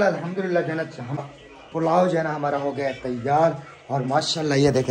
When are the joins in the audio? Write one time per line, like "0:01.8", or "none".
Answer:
0:01.2